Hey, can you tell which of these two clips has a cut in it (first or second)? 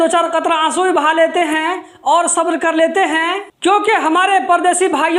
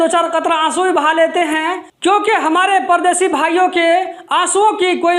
second